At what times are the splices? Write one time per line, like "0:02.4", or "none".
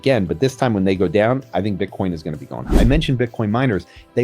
0:02.8